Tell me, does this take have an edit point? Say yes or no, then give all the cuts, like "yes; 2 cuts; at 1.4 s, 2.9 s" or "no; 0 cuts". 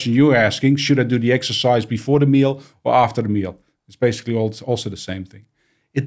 no; 0 cuts